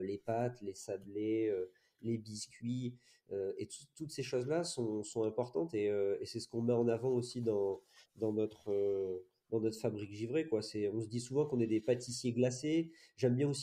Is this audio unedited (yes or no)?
yes